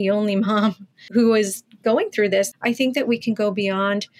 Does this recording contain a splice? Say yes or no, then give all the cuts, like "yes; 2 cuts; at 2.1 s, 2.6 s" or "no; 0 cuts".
yes; 2 cuts; at 1.1 s, 2.5 s